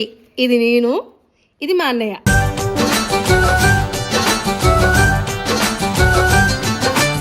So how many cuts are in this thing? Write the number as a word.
zero